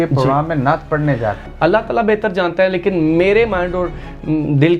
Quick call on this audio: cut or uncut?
cut